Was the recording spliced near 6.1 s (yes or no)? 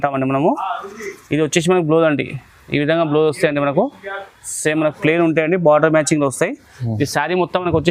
no